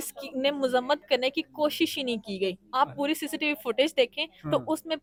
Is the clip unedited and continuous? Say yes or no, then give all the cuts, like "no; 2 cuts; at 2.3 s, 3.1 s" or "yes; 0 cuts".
yes; 0 cuts